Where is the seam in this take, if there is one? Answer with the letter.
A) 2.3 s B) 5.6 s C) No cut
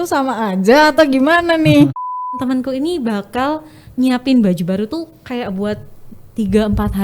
A